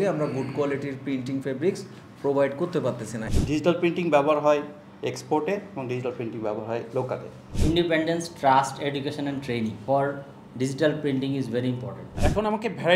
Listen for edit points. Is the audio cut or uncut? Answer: cut